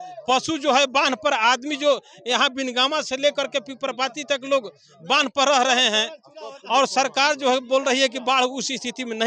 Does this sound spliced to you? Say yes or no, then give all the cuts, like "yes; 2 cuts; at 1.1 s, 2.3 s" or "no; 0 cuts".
no; 0 cuts